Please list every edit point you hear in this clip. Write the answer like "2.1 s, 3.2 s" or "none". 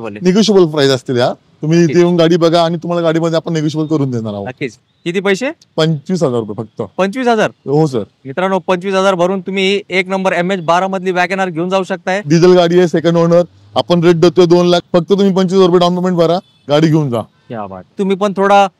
4.7 s, 12.2 s, 14.8 s, 17.9 s